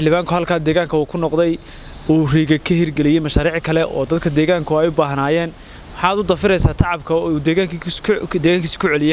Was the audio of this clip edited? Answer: no; 0 cuts

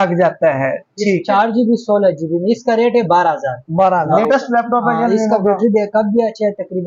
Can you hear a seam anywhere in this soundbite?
yes; 1 cut; at 4.1 s

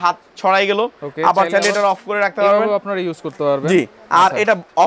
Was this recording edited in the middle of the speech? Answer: no; 0 cuts

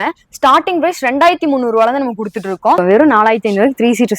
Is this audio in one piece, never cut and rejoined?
no; 1 cut; at 2.8 s

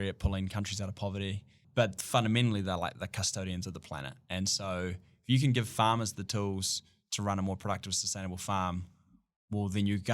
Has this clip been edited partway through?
yes; 1 cut; at 1.6 s

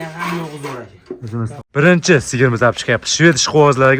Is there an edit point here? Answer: yes; 1 cut; at 1.5 s

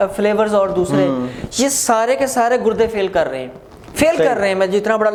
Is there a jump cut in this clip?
no; 0 cuts

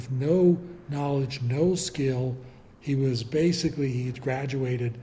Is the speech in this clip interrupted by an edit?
no; 0 cuts

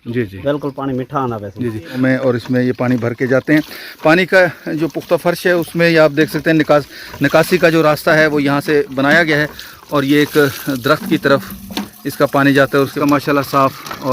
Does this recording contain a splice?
yes; 2 cuts; at 2.0 s, 13.0 s

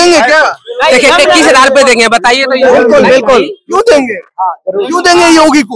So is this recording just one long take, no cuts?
yes; 0 cuts

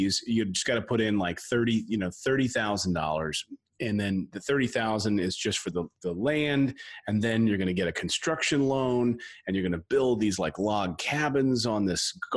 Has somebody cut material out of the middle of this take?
no; 0 cuts

